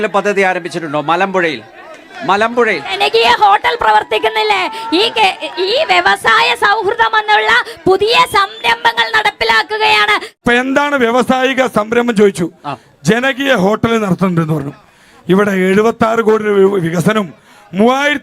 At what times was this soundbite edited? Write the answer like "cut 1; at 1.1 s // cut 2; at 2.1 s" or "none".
cut 1; at 10.3 s